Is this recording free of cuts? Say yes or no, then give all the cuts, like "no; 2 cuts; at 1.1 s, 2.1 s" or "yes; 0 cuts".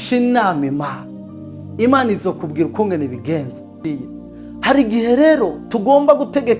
no; 1 cut; at 4.0 s